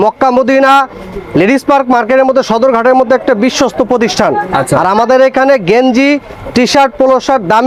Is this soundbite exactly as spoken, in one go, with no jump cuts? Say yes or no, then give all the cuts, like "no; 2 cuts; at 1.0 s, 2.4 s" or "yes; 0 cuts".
yes; 0 cuts